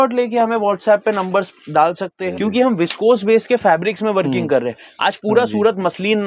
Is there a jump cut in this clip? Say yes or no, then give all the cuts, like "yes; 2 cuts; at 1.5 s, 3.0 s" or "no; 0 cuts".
yes; 1 cut; at 2.2 s